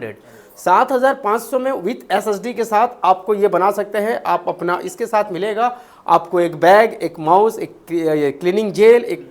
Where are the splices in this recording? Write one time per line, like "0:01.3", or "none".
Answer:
none